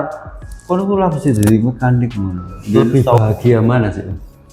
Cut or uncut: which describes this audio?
cut